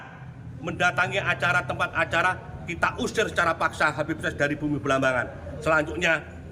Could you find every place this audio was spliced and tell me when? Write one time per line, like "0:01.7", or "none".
none

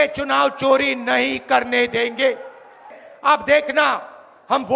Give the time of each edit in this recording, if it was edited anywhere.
0:03.0

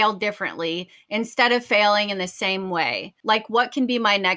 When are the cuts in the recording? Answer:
0:03.1

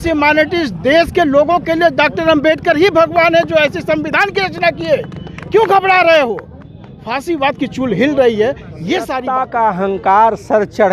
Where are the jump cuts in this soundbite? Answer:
0:09.2

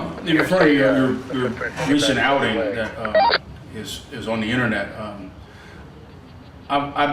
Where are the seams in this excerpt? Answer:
0:03.0

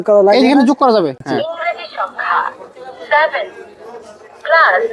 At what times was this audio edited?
0:01.2

